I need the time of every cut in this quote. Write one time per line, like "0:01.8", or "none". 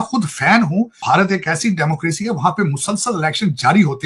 0:01.0